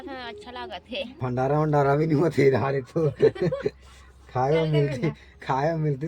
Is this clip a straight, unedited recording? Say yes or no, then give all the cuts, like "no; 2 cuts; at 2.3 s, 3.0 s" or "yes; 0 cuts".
no; 1 cut; at 1.1 s